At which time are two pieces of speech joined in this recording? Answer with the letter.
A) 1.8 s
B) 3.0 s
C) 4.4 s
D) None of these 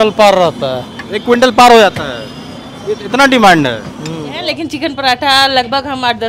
C